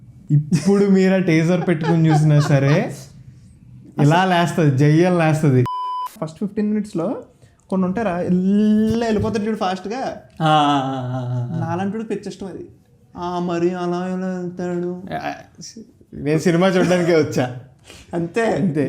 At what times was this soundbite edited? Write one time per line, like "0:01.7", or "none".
0:06.1

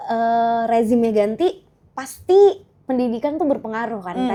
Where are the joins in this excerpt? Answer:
none

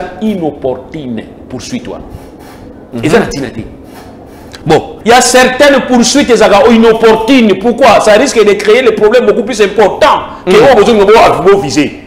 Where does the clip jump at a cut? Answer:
0:04.9

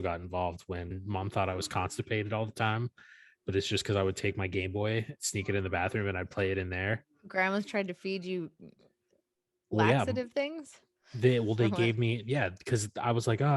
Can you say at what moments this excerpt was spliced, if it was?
0:01.0

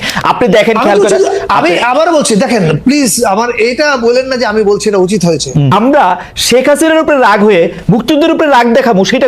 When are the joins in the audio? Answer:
0:05.7

